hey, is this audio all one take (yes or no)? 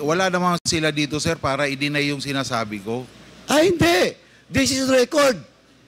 no